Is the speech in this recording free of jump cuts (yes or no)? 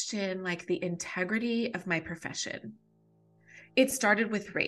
no